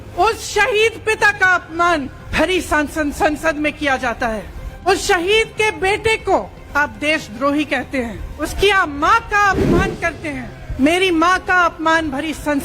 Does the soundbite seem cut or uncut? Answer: cut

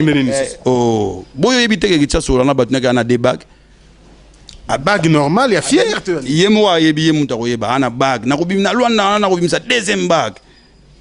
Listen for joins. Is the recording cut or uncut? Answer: cut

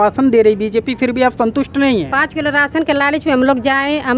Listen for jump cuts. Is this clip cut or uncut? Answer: uncut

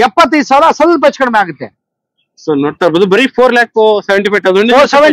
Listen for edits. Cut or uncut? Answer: uncut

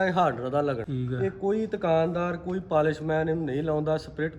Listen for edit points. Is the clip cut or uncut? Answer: cut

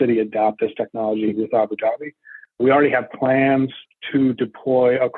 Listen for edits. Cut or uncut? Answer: cut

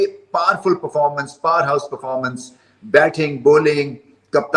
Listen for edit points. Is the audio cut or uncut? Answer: uncut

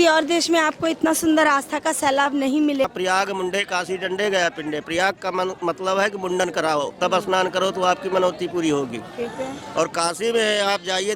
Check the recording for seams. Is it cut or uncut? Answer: cut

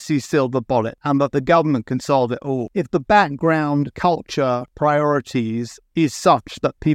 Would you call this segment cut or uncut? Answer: cut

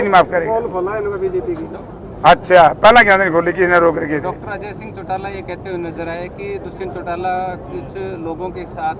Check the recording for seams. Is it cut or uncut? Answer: uncut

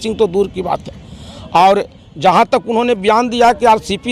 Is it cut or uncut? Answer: uncut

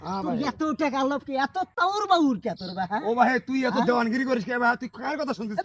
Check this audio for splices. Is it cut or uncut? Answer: cut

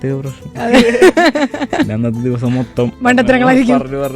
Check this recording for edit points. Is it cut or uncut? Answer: cut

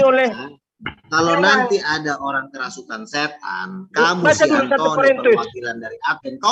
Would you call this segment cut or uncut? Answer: uncut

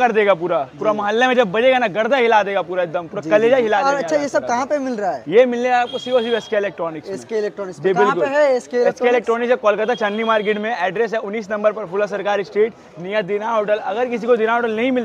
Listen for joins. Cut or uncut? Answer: uncut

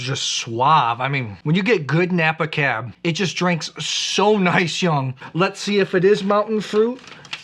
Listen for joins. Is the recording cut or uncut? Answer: cut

